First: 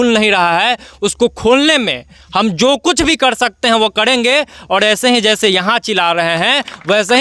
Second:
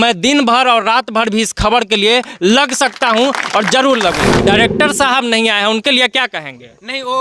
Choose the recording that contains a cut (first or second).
second